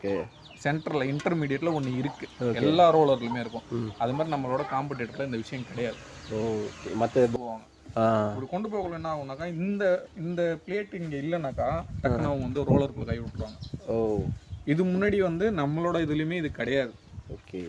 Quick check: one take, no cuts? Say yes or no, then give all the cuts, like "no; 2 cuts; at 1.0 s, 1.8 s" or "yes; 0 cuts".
no; 1 cut; at 7.4 s